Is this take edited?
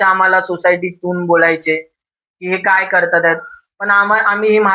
no; 0 cuts

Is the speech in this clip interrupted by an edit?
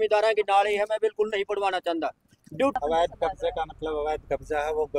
yes; 1 cut; at 2.8 s

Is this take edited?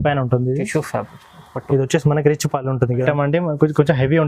yes; 1 cut; at 3.0 s

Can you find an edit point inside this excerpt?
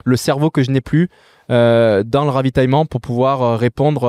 no; 0 cuts

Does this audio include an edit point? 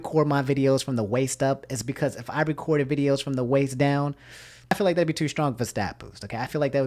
yes; 1 cut; at 4.7 s

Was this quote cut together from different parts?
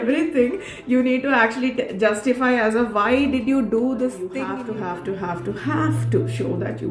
yes; 1 cut; at 4.5 s

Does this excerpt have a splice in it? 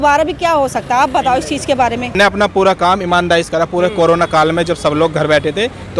yes; 1 cut; at 2.1 s

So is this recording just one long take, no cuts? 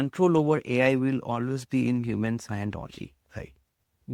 yes; 0 cuts

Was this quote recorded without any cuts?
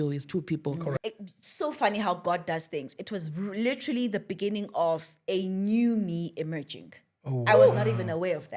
no; 1 cut; at 0.9 s

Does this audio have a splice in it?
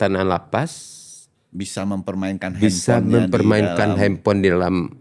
no; 0 cuts

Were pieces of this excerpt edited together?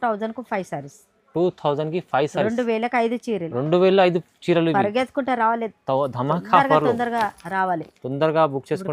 no; 0 cuts

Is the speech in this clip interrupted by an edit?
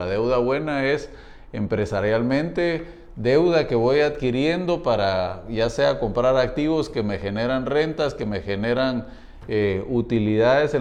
no; 0 cuts

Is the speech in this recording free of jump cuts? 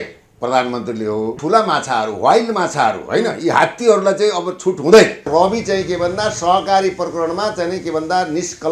no; 2 cuts; at 1.4 s, 5.3 s

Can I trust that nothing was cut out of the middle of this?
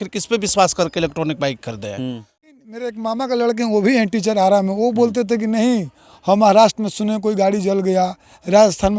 no; 1 cut; at 2.5 s

